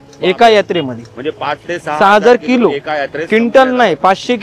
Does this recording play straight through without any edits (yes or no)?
yes